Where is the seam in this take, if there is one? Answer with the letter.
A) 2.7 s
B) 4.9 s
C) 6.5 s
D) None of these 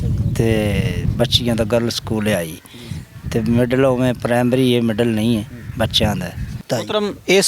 C